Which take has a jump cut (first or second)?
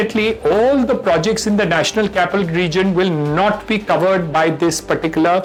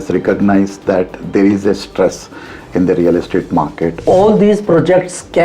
second